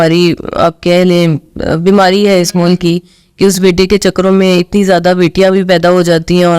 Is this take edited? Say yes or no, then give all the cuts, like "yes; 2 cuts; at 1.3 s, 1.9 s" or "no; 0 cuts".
no; 0 cuts